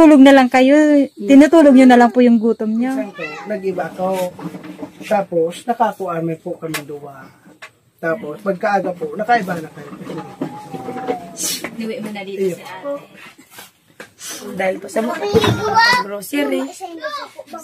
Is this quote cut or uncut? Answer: cut